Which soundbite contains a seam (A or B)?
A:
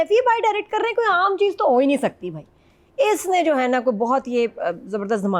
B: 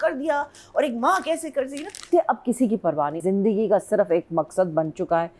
B